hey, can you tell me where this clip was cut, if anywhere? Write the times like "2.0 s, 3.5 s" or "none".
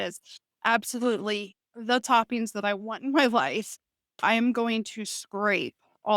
4.2 s